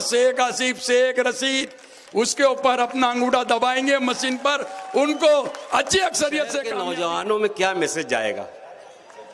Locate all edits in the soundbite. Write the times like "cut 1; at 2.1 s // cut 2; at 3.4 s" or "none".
cut 1; at 6.7 s